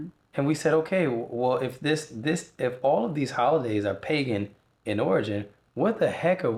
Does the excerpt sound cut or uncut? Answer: uncut